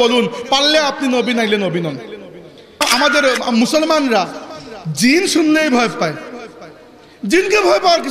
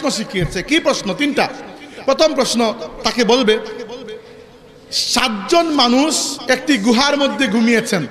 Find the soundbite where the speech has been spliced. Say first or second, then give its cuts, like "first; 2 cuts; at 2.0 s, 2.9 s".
first; 1 cut; at 2.8 s